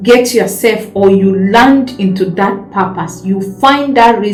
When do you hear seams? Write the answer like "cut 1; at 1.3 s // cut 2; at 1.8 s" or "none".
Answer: none